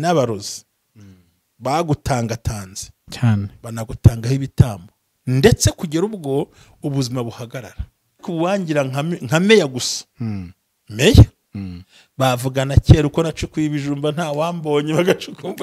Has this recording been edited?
yes; 1 cut; at 8.2 s

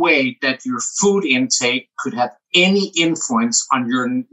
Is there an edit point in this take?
no; 0 cuts

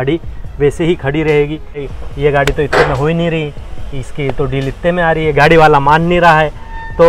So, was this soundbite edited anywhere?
yes; 1 cut; at 2.0 s

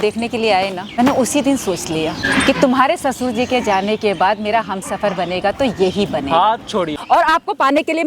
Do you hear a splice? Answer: yes; 3 cuts; at 0.9 s, 2.2 s, 7.0 s

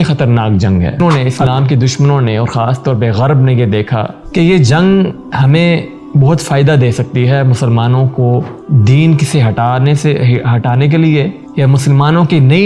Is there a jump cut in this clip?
yes; 1 cut; at 1.0 s

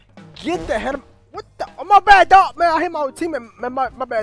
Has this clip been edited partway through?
no; 0 cuts

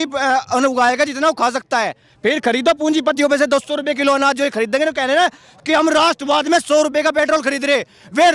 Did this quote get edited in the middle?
no; 0 cuts

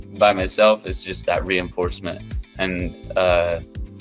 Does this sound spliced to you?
no; 0 cuts

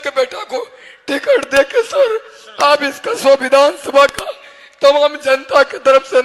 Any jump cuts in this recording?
no; 0 cuts

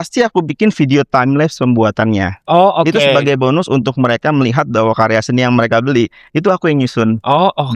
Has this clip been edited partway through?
no; 0 cuts

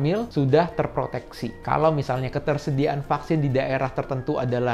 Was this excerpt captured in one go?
yes; 0 cuts

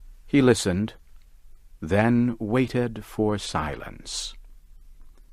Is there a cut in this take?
yes; 1 cut; at 2.1 s

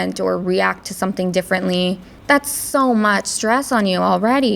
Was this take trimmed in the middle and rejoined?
yes; 1 cut; at 2.1 s

